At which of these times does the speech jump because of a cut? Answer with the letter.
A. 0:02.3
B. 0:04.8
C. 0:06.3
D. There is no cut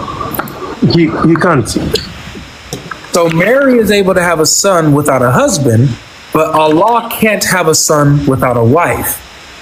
D